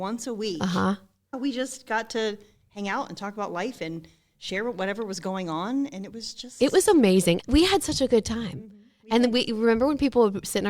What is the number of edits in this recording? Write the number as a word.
two